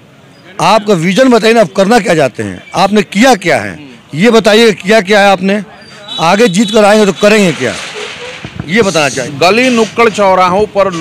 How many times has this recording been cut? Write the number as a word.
one